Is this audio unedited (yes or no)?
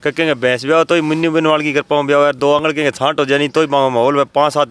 yes